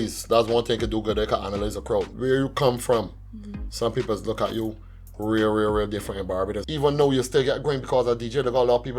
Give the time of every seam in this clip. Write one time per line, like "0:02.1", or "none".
0:02.1
0:06.6